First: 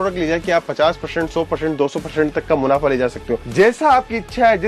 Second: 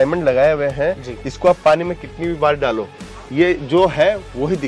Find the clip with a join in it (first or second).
first